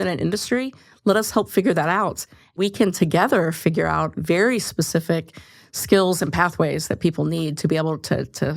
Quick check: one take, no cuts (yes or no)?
no